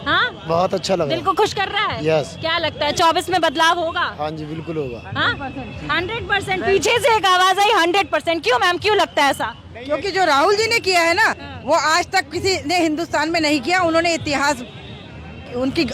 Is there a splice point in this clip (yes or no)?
no